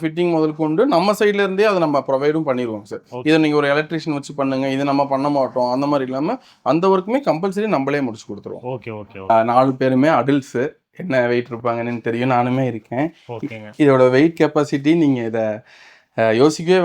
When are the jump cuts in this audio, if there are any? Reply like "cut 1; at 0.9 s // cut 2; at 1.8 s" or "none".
cut 1; at 9.2 s